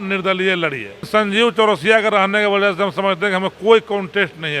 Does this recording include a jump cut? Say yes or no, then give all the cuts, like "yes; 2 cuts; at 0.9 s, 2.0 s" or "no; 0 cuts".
yes; 1 cut; at 1.1 s